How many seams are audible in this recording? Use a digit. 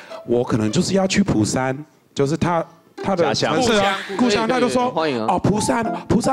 0